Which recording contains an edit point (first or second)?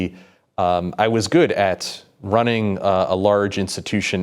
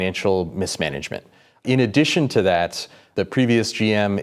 second